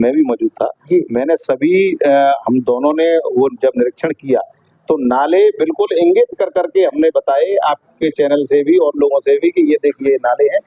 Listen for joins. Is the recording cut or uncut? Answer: uncut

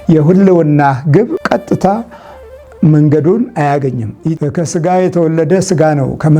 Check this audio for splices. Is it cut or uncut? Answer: cut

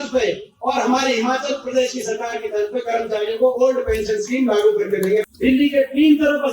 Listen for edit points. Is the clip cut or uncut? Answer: cut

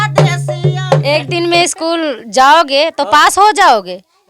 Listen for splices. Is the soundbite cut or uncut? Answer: cut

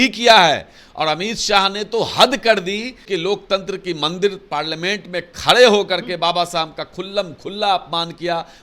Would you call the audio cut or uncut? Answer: cut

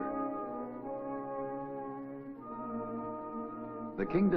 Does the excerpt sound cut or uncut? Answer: uncut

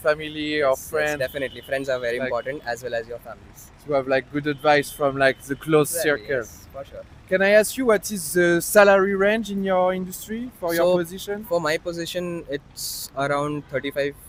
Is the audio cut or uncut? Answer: uncut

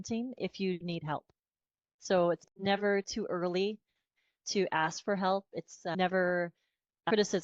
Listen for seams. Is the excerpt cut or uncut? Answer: uncut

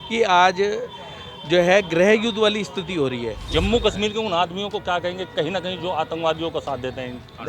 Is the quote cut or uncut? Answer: cut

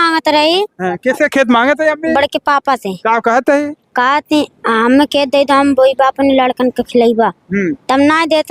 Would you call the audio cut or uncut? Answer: uncut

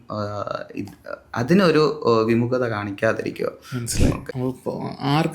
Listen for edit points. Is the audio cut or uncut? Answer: cut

